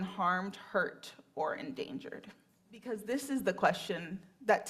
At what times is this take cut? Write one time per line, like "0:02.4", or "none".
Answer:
0:03.0